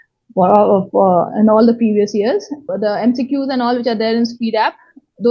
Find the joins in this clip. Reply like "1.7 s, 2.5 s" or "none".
2.6 s